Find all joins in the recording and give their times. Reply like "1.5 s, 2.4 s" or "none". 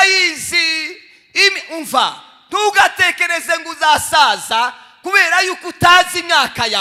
none